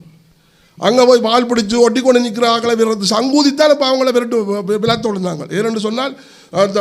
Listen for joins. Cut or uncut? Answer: uncut